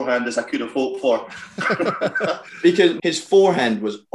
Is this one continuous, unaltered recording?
no; 1 cut; at 3.0 s

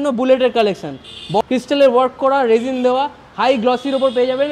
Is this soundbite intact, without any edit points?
no; 1 cut; at 1.4 s

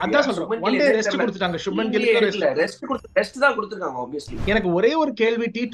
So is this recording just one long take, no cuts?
no; 1 cut; at 4.4 s

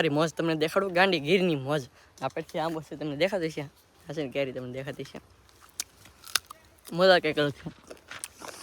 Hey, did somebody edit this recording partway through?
no; 0 cuts

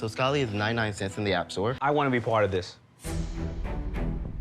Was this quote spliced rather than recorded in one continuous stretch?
yes; 1 cut; at 1.8 s

